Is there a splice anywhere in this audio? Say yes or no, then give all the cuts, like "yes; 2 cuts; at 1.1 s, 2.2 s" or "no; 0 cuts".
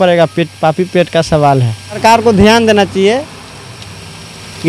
yes; 1 cut; at 2.0 s